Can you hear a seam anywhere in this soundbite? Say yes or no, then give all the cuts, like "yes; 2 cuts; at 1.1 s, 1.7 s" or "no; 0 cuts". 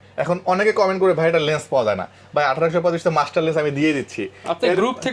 no; 0 cuts